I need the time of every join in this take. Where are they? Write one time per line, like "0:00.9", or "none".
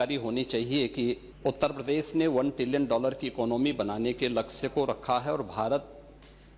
0:01.3